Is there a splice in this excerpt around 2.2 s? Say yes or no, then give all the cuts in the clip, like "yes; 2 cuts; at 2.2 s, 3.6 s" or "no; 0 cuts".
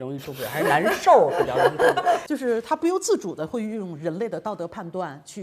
yes; 1 cut; at 2.2 s